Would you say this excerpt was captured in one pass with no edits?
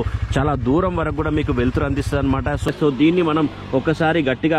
no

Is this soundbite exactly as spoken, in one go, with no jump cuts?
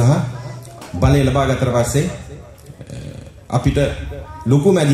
yes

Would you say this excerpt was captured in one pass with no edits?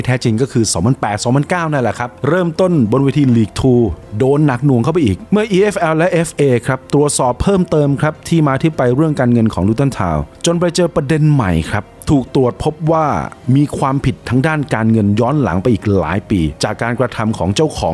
yes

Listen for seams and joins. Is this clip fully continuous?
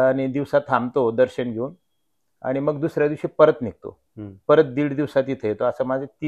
yes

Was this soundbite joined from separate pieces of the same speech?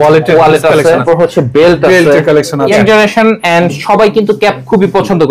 yes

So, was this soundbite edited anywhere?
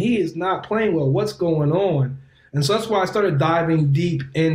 no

